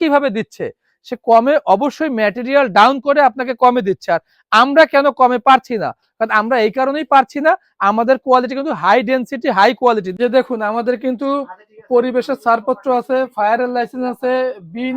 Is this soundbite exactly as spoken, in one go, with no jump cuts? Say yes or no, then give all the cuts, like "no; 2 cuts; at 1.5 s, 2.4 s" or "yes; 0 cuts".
no; 1 cut; at 10.1 s